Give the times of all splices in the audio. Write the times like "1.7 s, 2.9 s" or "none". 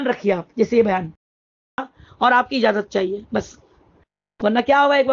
1.5 s